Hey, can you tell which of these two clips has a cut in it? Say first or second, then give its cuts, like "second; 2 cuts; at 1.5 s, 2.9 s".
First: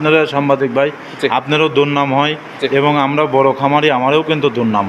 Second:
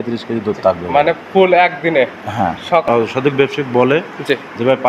second; 1 cut; at 2.8 s